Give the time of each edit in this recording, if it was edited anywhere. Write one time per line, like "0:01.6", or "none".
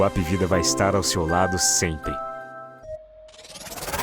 0:02.8

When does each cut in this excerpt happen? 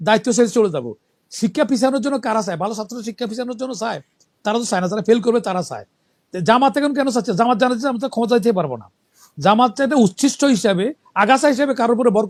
none

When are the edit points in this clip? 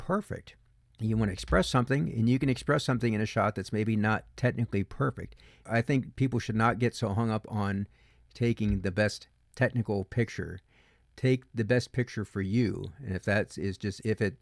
0:05.6

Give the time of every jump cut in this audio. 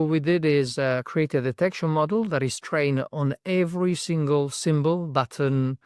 none

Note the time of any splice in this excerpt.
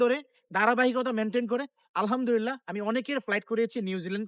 none

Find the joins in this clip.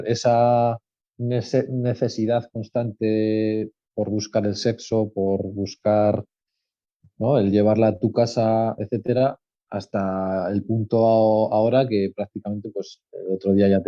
none

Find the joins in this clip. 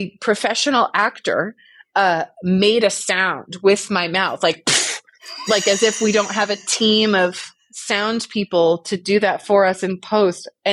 none

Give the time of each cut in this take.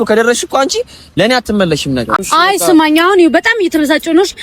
0:02.2

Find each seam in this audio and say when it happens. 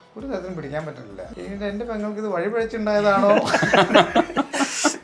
0:01.3

